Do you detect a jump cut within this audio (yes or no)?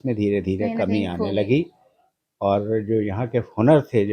no